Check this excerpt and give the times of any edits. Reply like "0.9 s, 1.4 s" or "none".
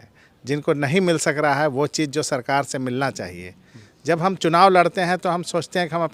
none